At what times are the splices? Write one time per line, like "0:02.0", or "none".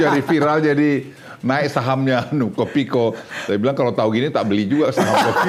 none

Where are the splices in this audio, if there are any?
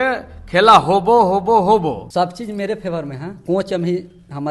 0:02.0
0:03.3

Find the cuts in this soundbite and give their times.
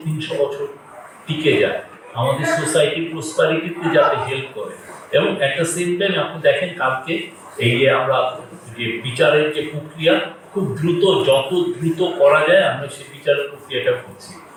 none

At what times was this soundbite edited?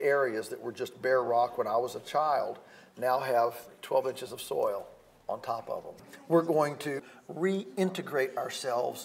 0:05.9
0:07.0

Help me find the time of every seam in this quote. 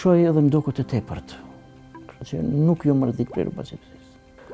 none

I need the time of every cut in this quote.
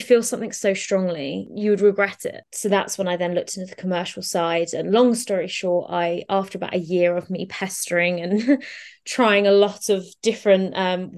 0:01.4
0:02.5

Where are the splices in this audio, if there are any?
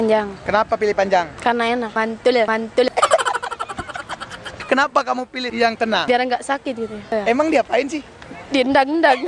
0:01.9
0:02.9
0:04.6
0:05.4
0:07.1

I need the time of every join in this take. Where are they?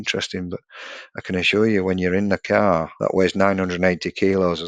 0:02.9

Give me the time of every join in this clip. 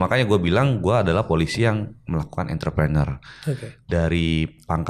none

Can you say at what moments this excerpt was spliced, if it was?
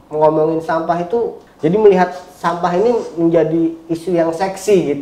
0:01.4

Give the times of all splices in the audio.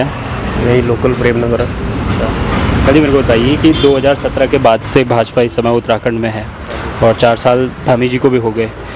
none

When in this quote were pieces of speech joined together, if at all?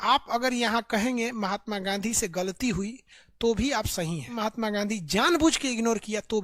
0:04.4

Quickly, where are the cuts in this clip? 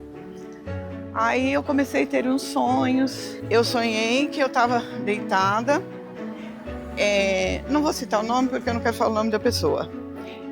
0:03.1

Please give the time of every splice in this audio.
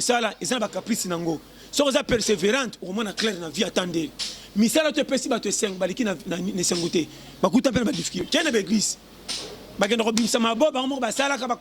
0:08.2

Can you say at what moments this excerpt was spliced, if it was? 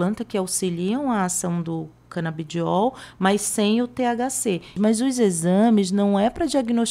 0:04.7

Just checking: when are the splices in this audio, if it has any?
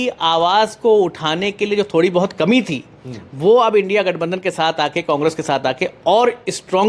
none

